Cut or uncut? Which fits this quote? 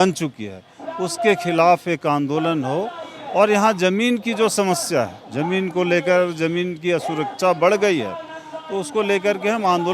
uncut